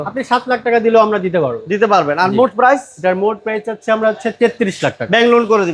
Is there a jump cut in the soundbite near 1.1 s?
no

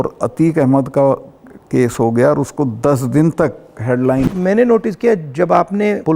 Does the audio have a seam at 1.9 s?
no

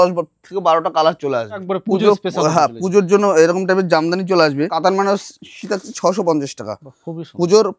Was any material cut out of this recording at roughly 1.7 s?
yes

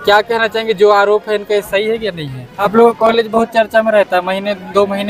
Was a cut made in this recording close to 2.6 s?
yes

